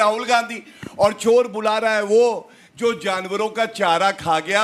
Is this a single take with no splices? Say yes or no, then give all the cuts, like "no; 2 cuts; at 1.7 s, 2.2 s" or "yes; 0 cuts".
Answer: yes; 0 cuts